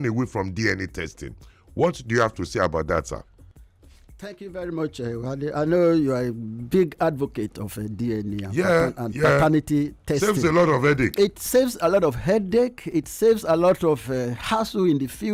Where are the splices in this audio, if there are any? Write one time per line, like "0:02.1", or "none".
none